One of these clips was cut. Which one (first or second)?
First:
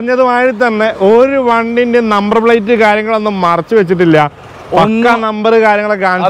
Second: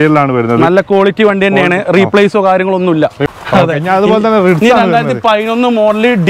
second